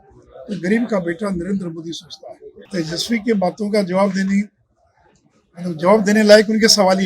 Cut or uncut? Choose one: cut